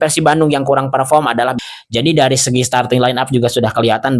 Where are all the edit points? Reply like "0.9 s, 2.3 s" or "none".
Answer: 1.5 s